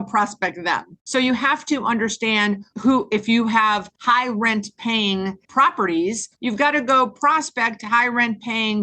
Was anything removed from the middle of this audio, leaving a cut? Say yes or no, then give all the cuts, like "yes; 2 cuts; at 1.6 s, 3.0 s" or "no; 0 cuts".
yes; 5 cuts; at 0.9 s, 2.7 s, 3.9 s, 5.4 s, 6.3 s